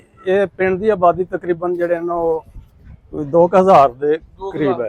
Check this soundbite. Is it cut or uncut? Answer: uncut